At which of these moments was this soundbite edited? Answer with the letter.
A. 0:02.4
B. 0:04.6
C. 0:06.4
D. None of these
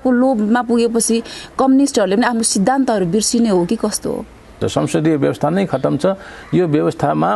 B